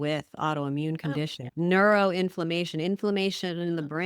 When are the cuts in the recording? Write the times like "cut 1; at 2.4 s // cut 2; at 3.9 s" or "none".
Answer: cut 1; at 1.4 s